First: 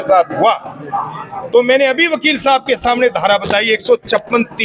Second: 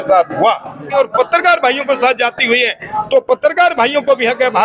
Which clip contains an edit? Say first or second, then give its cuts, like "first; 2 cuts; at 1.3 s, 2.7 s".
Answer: second; 1 cut; at 1.0 s